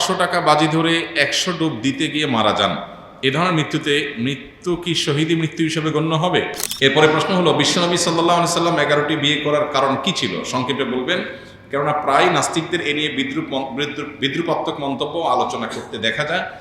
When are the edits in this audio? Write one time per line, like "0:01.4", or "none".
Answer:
0:06.6